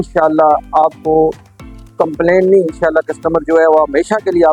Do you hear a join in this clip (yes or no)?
no